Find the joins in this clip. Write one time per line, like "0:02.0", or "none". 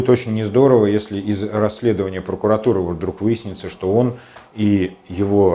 none

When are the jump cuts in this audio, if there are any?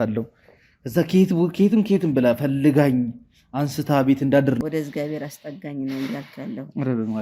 0:04.6

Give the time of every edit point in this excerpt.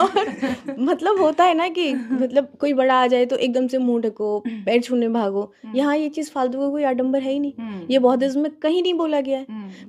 none

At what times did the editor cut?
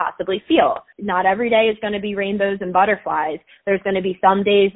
0:00.9

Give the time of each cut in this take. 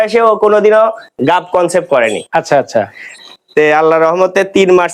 0:03.1

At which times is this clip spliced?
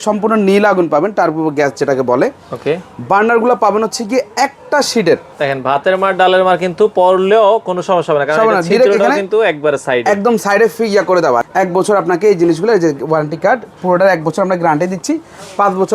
0:05.3
0:11.5

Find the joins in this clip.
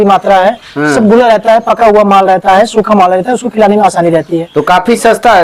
none

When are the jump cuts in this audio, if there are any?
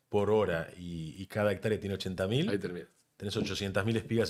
none

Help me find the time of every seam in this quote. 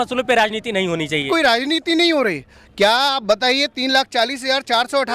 0:01.3

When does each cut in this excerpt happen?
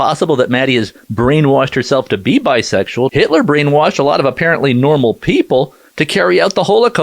0:03.1

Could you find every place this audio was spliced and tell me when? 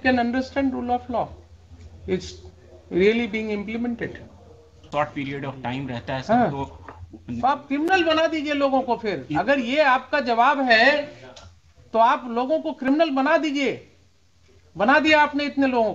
0:04.8

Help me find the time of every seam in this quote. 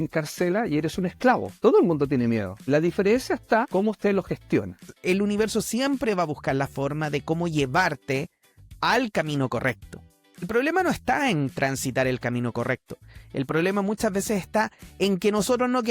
0:01.5
0:02.5
0:03.7
0:04.9
0:10.5

